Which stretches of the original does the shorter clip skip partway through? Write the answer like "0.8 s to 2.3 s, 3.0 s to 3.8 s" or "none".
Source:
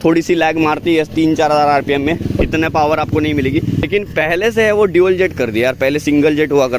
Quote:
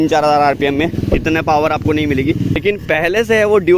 none